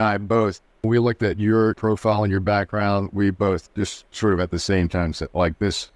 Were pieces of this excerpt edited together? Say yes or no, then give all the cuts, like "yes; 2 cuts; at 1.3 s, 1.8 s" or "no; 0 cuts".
yes; 2 cuts; at 0.8 s, 1.8 s